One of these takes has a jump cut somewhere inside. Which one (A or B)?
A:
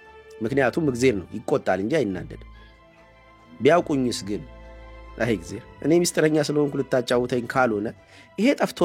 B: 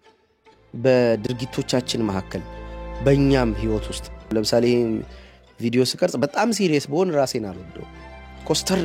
B